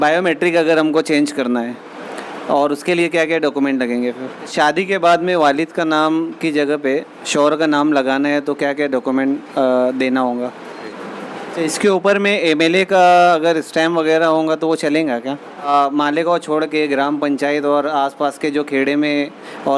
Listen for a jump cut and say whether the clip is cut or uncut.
cut